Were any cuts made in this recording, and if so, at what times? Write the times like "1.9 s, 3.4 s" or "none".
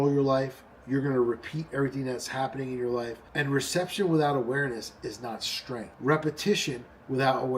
3.2 s, 5.9 s